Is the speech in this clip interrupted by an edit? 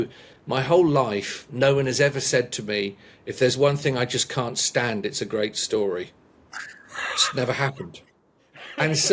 no; 0 cuts

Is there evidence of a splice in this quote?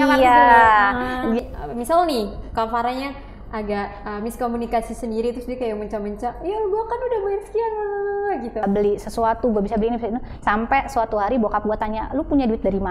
yes; 2 cuts; at 1.4 s, 8.6 s

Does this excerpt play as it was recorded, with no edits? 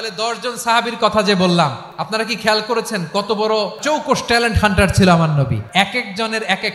no; 3 cuts; at 1.9 s, 3.8 s, 5.6 s

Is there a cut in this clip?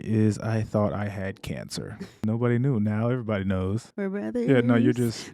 yes; 2 cuts; at 2.2 s, 3.9 s

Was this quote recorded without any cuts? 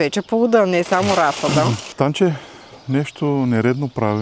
no; 1 cut; at 1.9 s

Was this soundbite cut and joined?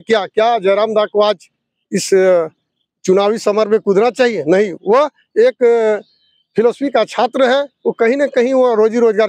no; 0 cuts

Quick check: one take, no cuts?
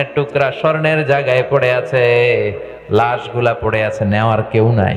yes; 0 cuts

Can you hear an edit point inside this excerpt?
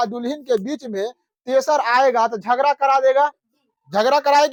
no; 0 cuts

